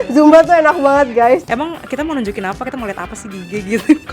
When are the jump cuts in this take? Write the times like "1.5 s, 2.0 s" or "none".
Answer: 1.4 s